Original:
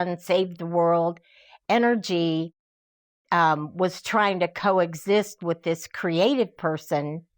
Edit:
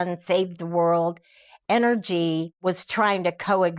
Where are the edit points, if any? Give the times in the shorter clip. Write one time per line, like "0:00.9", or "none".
0:02.5